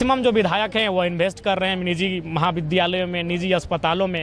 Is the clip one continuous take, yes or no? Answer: yes